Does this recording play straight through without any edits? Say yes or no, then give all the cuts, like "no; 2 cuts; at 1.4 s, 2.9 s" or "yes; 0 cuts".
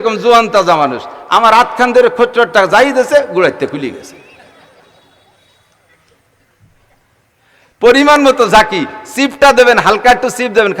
yes; 0 cuts